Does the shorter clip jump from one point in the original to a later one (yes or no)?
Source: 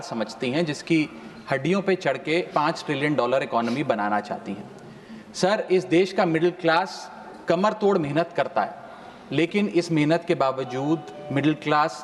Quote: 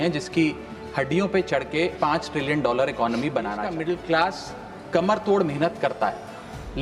yes